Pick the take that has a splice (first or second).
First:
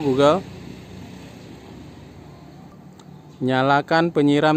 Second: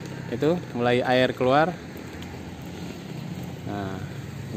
first